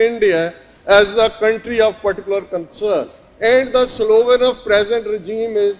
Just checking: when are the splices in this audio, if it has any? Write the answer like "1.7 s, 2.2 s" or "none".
3.2 s